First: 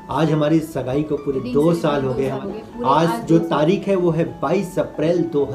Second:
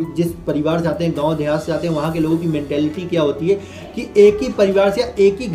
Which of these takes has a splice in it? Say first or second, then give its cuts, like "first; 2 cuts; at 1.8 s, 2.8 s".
first; 1 cut; at 2.4 s